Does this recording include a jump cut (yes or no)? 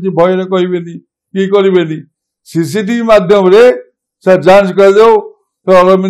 no